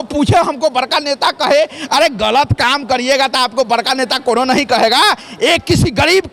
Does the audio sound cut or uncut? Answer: uncut